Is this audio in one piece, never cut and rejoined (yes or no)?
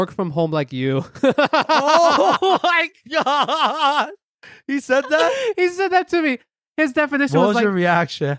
yes